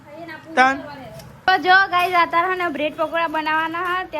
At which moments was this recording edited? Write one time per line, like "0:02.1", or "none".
0:01.4